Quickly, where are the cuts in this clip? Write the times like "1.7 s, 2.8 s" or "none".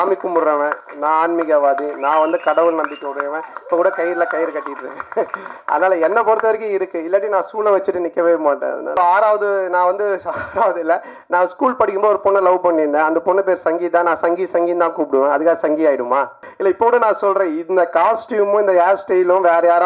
9.0 s, 16.4 s